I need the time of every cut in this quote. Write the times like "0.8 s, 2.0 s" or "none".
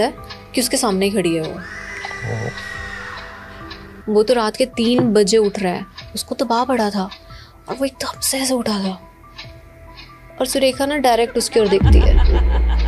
4.0 s